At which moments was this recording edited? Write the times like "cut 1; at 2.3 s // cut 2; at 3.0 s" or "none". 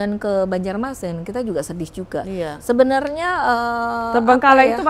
none